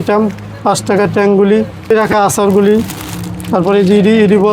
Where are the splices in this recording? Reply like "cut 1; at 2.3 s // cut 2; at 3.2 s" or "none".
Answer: cut 1; at 1.9 s